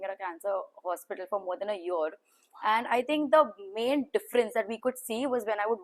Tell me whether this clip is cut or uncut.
uncut